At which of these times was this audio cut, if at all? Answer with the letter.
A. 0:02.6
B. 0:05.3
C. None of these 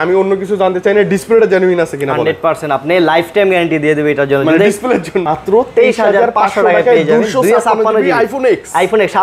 B